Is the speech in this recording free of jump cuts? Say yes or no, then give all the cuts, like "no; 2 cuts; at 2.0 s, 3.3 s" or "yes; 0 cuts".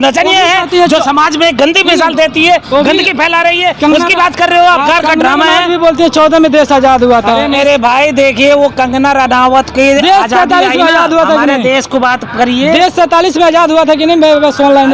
no; 1 cut; at 4.9 s